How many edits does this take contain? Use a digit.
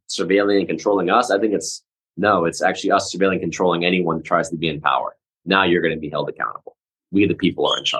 0